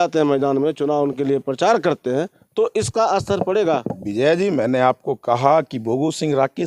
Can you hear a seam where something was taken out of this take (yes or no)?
no